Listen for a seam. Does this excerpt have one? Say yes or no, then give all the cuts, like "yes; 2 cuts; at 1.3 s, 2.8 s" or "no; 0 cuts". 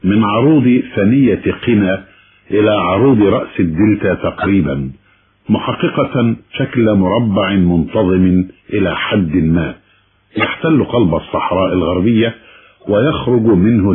yes; 1 cut; at 6.5 s